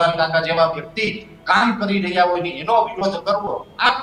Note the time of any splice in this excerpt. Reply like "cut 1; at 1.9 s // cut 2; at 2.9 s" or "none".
none